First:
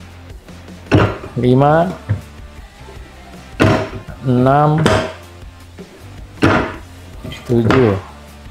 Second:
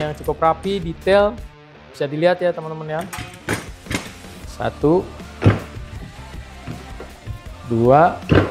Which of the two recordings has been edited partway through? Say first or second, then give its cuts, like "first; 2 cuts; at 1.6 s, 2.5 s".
second; 1 cut; at 4.2 s